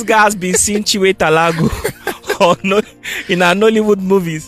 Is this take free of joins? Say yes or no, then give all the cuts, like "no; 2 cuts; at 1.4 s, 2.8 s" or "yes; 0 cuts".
yes; 0 cuts